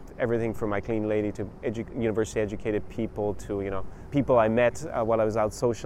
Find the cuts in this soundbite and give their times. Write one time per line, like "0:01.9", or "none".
0:03.9